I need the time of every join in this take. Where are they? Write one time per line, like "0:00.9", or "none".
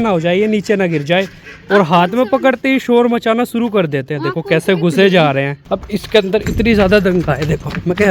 0:05.6